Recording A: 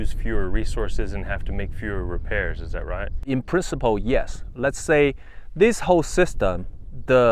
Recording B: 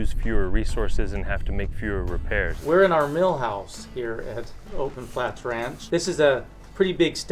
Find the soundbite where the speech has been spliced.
B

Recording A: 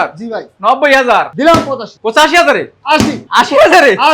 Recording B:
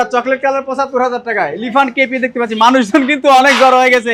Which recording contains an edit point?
A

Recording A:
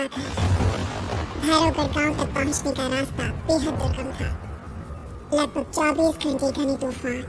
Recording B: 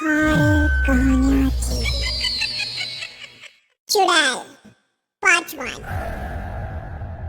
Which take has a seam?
B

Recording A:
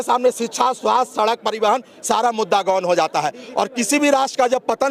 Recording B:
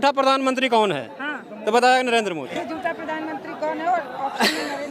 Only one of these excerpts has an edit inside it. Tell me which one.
B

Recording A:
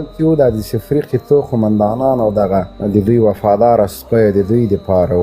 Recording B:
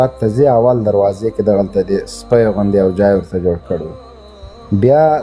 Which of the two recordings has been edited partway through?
A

